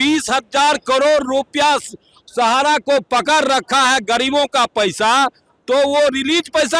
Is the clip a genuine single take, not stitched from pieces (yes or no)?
yes